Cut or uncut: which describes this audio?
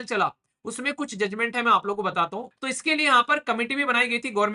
cut